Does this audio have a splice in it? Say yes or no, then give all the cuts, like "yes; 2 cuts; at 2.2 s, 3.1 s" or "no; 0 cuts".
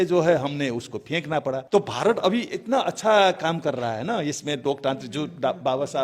yes; 1 cut; at 1.6 s